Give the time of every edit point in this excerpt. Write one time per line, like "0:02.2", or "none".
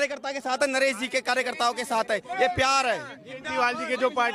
none